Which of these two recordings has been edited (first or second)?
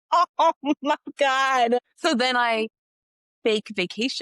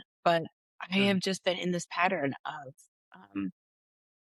first